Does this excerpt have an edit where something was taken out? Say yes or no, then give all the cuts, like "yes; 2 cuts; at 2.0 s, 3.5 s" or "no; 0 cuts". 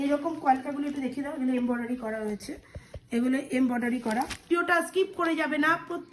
yes; 1 cut; at 4.5 s